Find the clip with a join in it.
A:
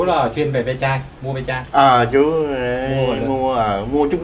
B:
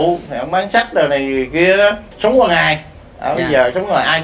B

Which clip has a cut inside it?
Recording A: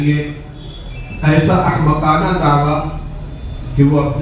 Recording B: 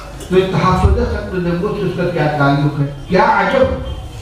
B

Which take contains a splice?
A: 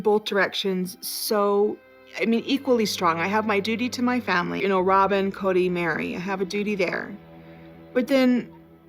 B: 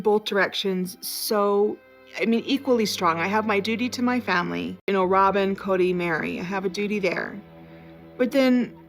A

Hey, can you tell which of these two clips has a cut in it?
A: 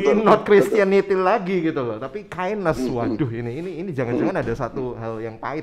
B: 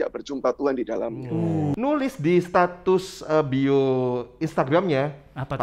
B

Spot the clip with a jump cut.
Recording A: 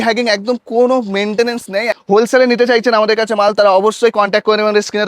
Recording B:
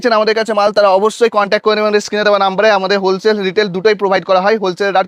A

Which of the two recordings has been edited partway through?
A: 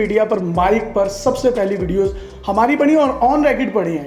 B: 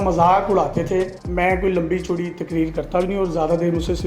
B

